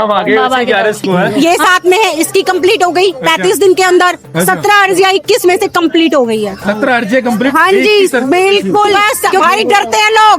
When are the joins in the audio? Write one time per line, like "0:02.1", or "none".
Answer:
0:01.3
0:09.4